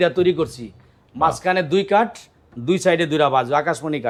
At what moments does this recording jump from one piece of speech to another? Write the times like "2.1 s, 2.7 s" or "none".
none